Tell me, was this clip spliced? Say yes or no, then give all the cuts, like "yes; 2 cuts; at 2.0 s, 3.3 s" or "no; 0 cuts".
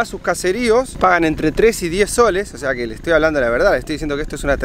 no; 0 cuts